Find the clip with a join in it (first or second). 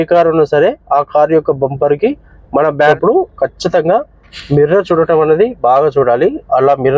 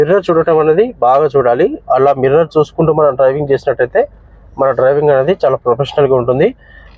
first